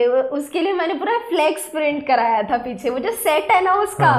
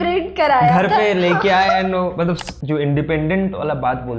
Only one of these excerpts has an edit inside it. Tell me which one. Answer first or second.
second